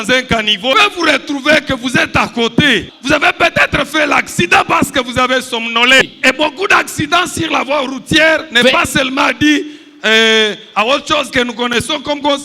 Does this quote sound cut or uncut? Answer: cut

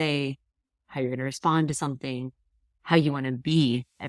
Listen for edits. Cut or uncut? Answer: uncut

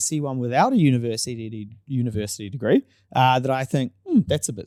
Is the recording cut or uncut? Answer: uncut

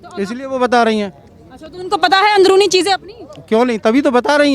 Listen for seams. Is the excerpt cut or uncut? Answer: uncut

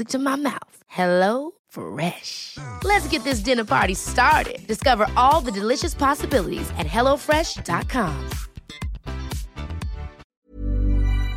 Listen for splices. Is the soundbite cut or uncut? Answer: cut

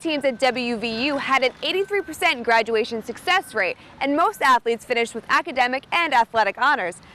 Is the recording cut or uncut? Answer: uncut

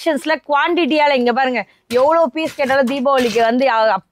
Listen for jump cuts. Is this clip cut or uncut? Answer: uncut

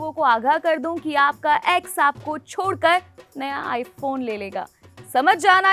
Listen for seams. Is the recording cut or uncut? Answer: uncut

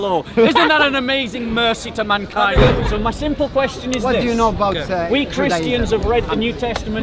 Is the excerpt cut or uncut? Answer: cut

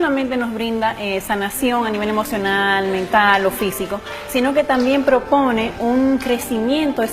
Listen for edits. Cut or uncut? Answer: cut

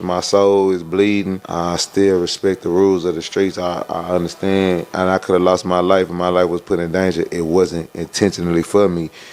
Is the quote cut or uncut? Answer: cut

